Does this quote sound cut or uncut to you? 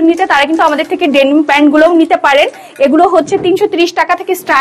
uncut